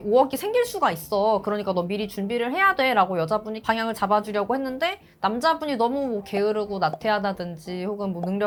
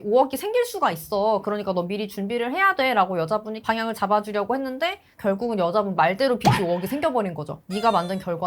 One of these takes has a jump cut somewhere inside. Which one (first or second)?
second